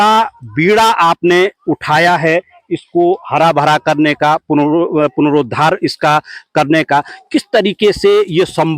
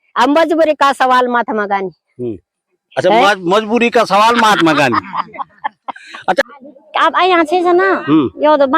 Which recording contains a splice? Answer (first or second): second